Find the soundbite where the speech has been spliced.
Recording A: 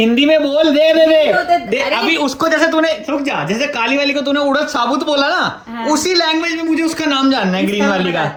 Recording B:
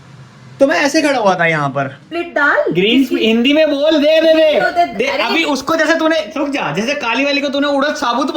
B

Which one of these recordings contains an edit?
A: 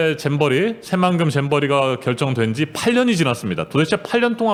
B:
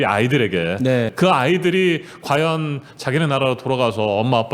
B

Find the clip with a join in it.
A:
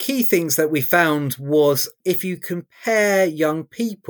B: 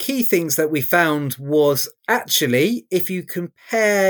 A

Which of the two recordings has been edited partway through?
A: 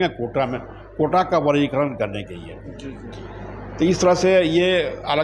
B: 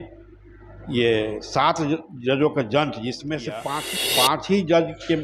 B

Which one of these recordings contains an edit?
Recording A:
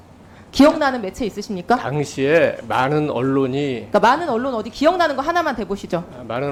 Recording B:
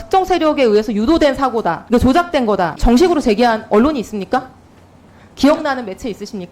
B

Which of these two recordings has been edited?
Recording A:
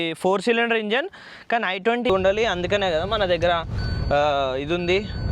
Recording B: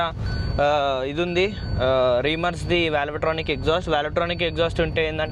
A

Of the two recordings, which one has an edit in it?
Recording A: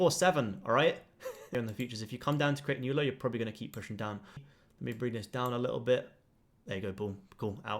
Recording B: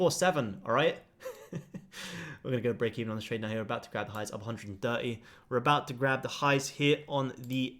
A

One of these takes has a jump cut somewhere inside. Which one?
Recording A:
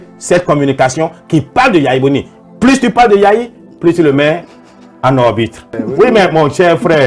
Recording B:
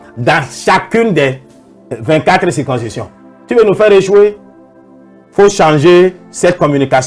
A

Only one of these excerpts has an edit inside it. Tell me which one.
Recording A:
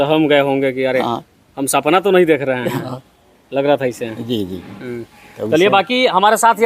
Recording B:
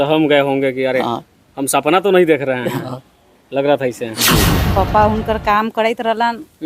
B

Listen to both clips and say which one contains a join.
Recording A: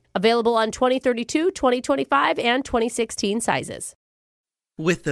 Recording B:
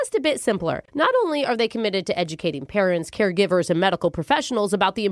A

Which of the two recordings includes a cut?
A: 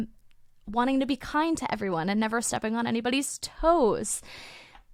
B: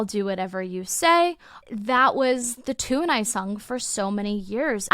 B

